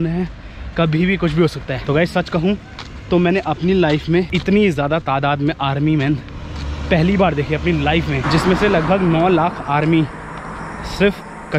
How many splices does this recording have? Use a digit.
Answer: 3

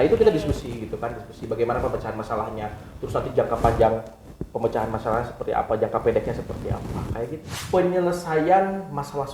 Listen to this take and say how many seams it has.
1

